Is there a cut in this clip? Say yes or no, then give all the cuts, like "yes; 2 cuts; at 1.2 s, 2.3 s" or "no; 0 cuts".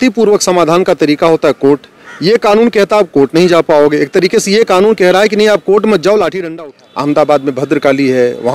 yes; 1 cut; at 6.4 s